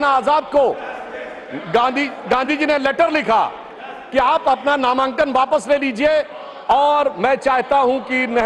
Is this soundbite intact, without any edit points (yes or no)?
yes